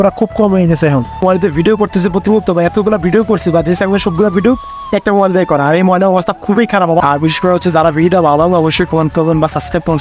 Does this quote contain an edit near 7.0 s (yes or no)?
yes